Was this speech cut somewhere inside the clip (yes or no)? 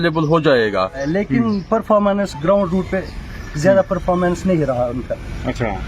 yes